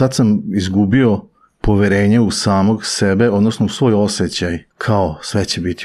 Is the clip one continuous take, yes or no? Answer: no